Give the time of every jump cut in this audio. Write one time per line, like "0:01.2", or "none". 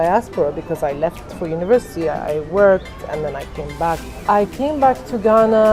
0:04.2